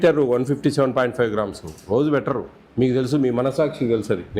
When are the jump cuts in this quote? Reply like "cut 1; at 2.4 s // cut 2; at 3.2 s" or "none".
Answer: cut 1; at 2.6 s